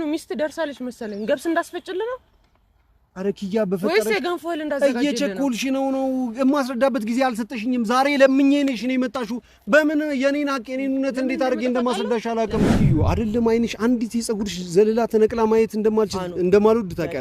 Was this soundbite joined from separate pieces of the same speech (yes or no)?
yes